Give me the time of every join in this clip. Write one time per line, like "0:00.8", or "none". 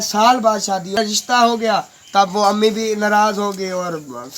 0:01.0